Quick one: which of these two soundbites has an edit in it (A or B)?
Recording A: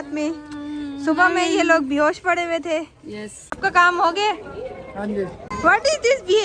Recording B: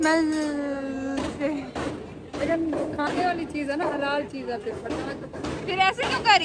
A